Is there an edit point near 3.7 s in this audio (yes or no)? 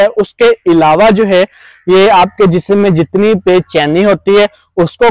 no